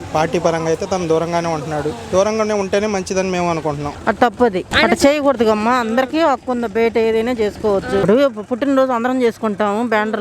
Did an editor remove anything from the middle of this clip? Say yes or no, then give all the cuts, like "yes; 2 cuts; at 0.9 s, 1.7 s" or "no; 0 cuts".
yes; 3 cuts; at 3.9 s, 4.7 s, 8.0 s